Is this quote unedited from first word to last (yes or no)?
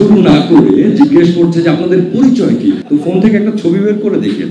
no